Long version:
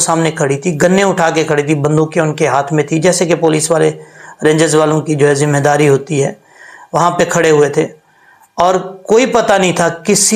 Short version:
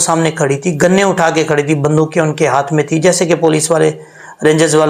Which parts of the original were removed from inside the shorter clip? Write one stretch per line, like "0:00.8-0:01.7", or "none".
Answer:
none